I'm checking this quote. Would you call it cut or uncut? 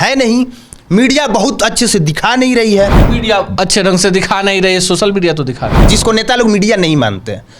cut